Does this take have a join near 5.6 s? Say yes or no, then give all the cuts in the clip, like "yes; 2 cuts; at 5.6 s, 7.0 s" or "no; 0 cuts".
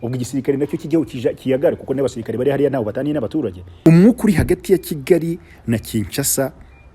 no; 1 cut; at 3.8 s